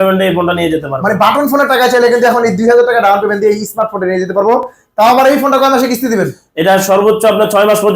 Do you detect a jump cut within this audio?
no; 0 cuts

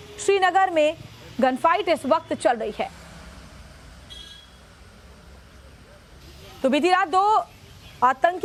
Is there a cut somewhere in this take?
no; 0 cuts

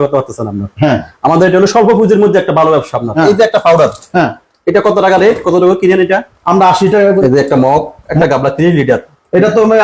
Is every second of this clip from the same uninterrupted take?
no; 3 cuts; at 3.1 s, 7.2 s, 8.1 s

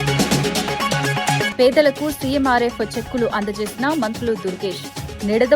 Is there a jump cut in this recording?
yes; 1 cut; at 1.5 s

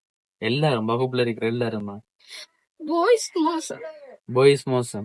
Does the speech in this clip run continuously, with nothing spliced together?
yes; 0 cuts

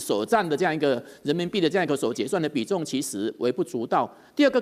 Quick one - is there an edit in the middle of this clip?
no; 0 cuts

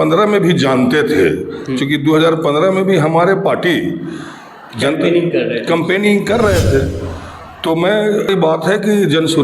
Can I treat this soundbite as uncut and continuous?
no; 1 cut; at 8.3 s

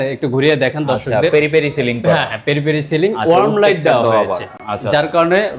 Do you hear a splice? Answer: no; 0 cuts

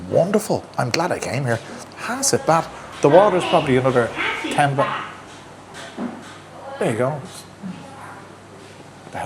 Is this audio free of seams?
yes; 0 cuts

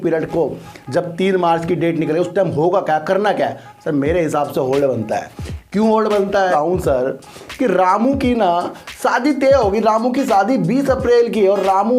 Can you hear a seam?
yes; 1 cut; at 6.4 s

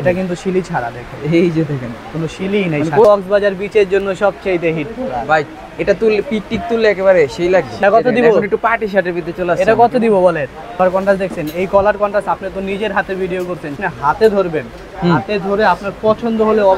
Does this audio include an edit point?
yes; 4 cuts; at 3.1 s, 7.8 s, 10.8 s, 13.8 s

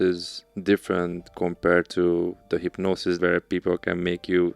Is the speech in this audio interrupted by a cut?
yes; 1 cut; at 3.2 s

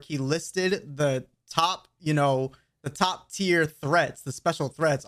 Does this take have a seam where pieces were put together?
no; 0 cuts

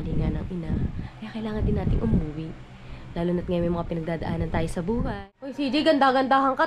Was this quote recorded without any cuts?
no; 1 cut; at 5.7 s

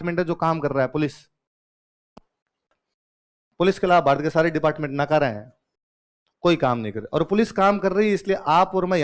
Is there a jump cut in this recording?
no; 0 cuts

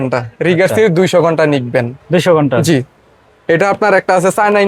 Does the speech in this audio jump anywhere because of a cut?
no; 0 cuts

